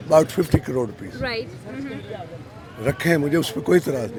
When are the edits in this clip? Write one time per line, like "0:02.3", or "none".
none